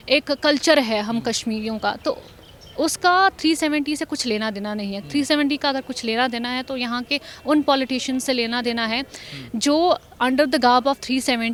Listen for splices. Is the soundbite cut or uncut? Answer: uncut